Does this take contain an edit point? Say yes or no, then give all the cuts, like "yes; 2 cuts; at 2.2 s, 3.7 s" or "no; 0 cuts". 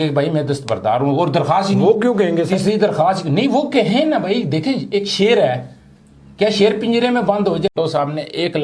yes; 1 cut; at 7.7 s